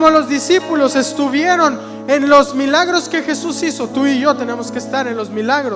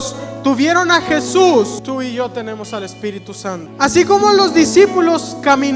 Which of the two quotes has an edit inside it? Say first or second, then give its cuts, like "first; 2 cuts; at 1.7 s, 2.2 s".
second; 2 cuts; at 1.8 s, 3.7 s